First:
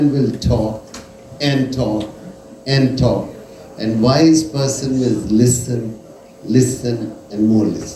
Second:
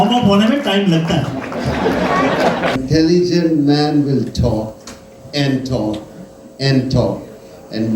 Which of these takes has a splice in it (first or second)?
second